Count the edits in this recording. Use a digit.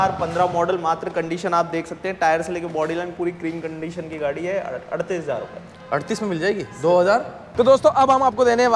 1